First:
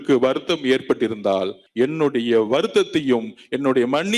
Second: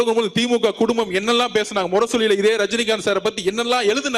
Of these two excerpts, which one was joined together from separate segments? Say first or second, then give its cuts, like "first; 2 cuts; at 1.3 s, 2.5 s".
first; 1 cut; at 1.6 s